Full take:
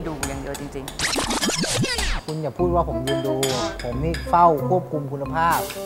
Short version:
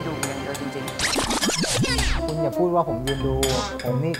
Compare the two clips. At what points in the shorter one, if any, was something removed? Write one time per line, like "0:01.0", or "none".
none